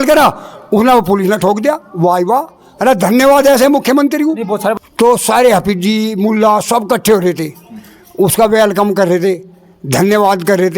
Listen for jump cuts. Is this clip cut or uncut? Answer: cut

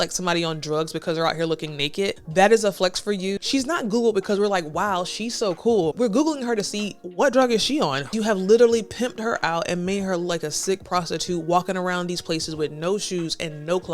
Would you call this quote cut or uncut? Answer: cut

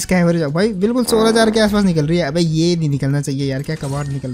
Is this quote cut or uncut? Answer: uncut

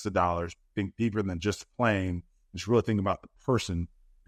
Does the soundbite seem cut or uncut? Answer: uncut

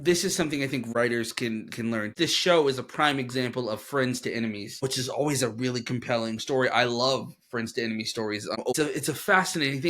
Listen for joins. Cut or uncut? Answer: cut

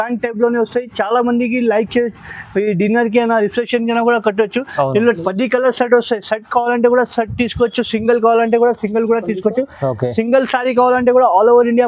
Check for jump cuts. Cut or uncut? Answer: uncut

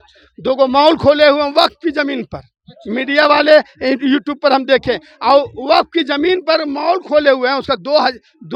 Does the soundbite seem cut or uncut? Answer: uncut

